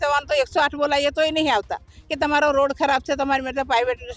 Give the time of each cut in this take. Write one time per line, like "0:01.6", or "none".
none